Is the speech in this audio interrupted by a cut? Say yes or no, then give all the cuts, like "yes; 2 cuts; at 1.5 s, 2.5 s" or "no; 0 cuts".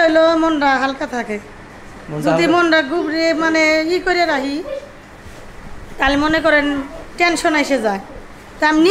no; 0 cuts